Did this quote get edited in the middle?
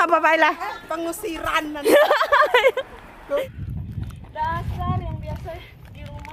yes; 1 cut; at 3.4 s

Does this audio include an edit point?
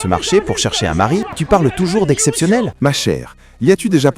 yes; 2 cuts; at 1.4 s, 2.7 s

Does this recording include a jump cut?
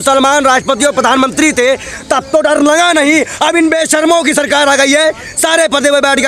no; 0 cuts

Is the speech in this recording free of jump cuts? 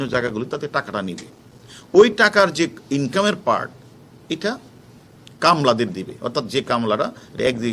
yes; 0 cuts

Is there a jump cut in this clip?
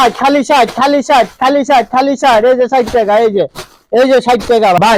no; 0 cuts

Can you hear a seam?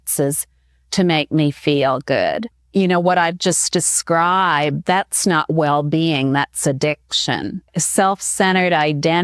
yes; 2 cuts; at 2.6 s, 7.8 s

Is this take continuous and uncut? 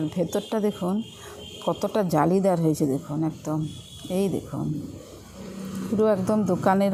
yes; 0 cuts

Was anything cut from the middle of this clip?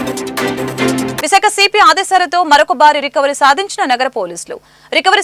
yes; 1 cut; at 1.2 s

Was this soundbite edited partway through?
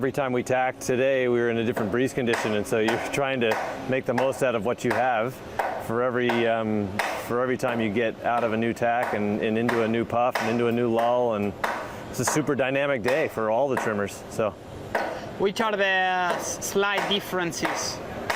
no; 0 cuts

